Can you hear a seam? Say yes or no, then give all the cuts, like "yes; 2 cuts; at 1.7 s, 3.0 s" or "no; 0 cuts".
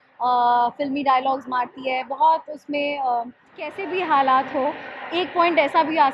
yes; 1 cut; at 3.8 s